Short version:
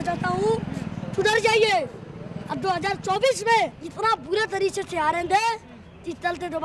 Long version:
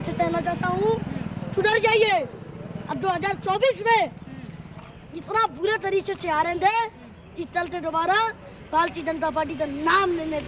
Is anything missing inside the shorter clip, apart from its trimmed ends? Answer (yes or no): yes